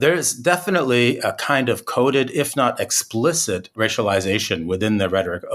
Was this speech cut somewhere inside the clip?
no; 0 cuts

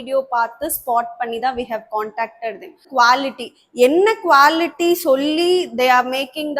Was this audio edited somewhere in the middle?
yes; 1 cut; at 2.8 s

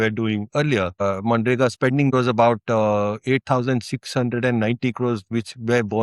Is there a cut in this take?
yes; 2 cuts; at 1.0 s, 2.1 s

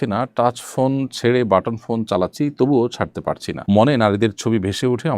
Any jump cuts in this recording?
no; 0 cuts

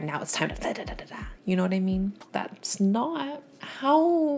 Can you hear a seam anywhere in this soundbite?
yes; 1 cut; at 2.2 s

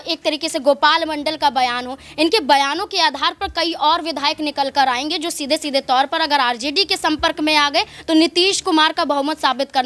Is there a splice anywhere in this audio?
no; 0 cuts

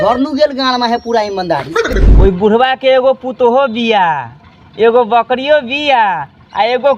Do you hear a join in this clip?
yes; 1 cut; at 2.0 s

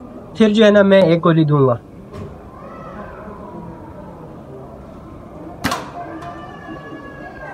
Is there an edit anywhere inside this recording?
yes; 1 cut; at 6.6 s

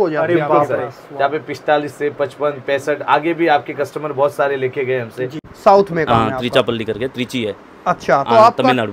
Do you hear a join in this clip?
yes; 1 cut; at 5.4 s

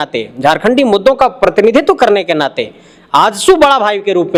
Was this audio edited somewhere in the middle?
no; 0 cuts

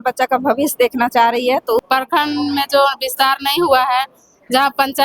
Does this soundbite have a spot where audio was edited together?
yes; 1 cut; at 1.8 s

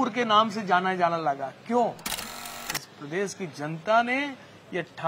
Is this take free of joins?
no; 1 cut; at 2.4 s

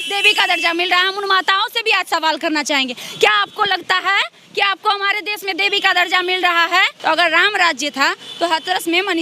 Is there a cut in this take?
yes; 1 cut; at 6.9 s

